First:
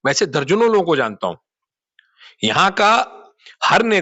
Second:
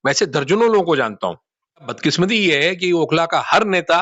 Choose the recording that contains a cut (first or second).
second